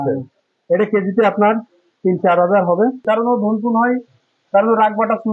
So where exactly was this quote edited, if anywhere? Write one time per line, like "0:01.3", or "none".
0:03.0